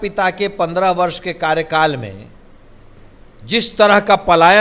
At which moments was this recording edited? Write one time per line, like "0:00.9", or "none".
none